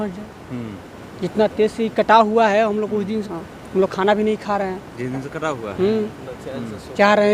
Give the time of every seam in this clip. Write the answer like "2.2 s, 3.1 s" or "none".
3.3 s